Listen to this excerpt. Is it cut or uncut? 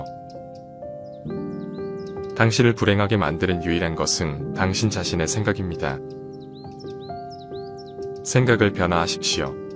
cut